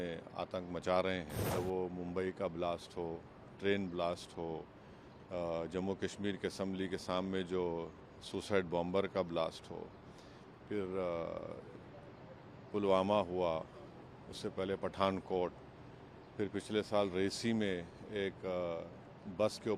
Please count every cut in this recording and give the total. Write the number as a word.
one